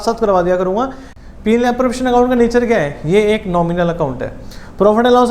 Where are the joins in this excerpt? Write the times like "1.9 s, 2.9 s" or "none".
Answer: 1.0 s